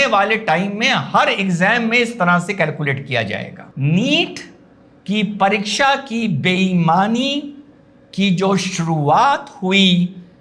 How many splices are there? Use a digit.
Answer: 1